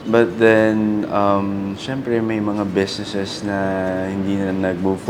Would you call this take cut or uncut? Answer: uncut